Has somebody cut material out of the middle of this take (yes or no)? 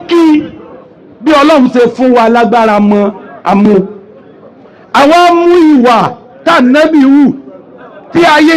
no